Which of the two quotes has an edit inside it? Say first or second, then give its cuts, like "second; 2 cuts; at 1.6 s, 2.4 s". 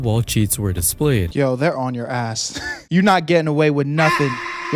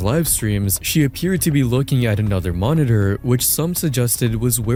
first; 1 cut; at 1.3 s